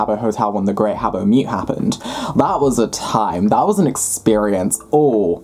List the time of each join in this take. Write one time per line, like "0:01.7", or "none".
none